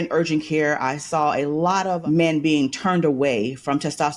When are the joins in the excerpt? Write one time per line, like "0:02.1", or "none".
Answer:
0:02.0